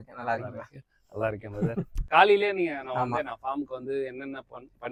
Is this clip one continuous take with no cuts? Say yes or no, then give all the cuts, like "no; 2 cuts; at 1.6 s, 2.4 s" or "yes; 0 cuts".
yes; 0 cuts